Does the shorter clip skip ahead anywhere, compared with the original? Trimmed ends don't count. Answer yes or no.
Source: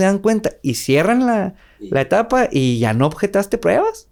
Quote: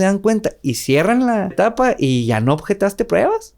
yes